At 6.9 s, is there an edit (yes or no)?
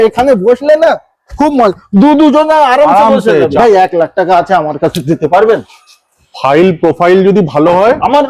no